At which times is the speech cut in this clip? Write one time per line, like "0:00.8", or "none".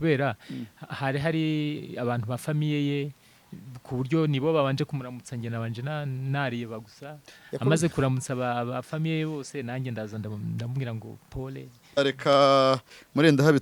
0:12.0